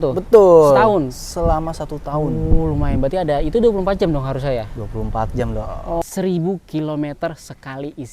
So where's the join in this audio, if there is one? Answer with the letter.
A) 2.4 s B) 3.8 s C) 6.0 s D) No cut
C